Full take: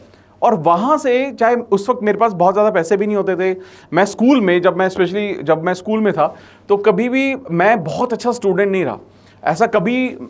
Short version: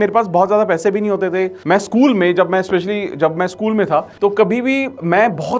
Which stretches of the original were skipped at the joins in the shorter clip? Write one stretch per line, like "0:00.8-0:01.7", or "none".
0:03.6-0:03.8
0:06.4-0:06.6